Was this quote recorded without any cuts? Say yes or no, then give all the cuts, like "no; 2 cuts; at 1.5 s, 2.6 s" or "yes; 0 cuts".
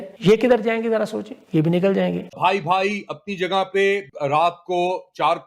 no; 1 cut; at 2.3 s